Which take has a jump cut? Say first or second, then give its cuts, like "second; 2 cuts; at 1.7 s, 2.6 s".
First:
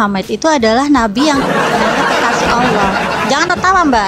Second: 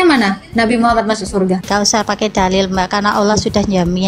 second; 1 cut; at 1.6 s